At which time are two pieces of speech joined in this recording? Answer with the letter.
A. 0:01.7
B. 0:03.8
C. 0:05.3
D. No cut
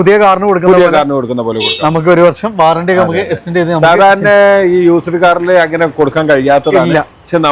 D